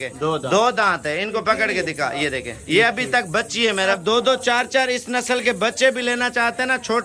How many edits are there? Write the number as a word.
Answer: one